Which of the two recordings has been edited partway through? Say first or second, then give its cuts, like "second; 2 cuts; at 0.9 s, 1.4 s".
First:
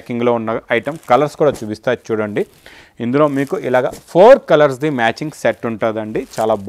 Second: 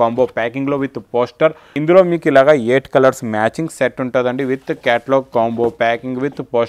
second; 1 cut; at 1.7 s